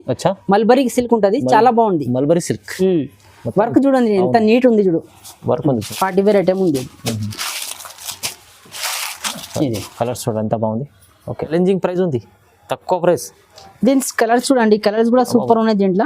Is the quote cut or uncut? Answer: cut